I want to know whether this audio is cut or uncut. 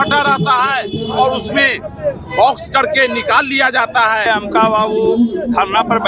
cut